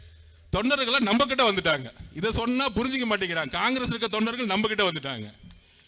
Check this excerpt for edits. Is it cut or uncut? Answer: uncut